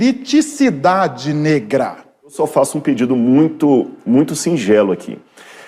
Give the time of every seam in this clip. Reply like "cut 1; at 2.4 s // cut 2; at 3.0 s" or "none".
cut 1; at 2.4 s

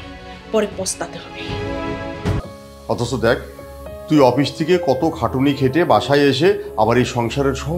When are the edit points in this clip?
cut 1; at 2.4 s

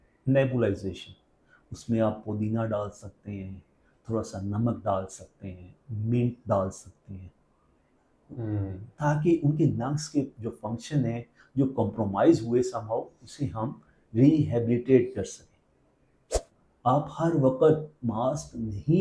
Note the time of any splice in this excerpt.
cut 1; at 16.6 s

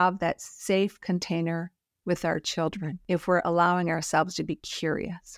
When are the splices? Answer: cut 1; at 3.0 s

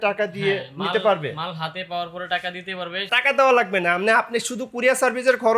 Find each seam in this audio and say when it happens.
cut 1; at 3.1 s

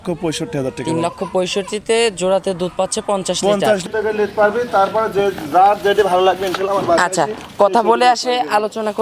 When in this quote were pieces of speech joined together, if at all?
cut 1; at 3.8 s

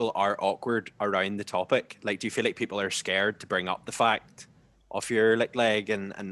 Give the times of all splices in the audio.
none

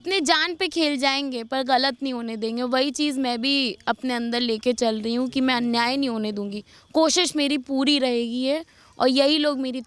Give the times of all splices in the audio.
none

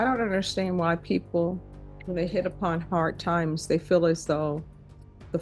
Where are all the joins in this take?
none

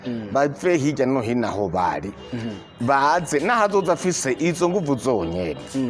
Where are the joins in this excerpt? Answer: none

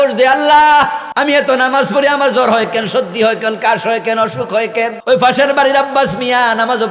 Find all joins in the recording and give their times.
cut 1; at 1.0 s // cut 2; at 5.0 s

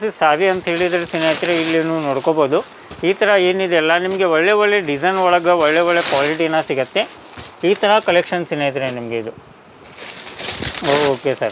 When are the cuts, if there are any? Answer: none

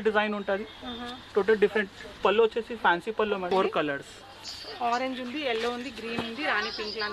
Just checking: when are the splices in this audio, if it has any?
cut 1; at 3.5 s

